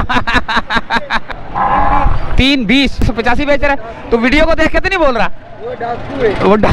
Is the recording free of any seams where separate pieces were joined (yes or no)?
no